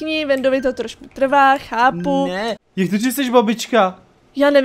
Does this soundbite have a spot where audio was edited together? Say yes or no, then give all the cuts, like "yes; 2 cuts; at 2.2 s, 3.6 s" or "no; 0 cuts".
yes; 1 cut; at 2.6 s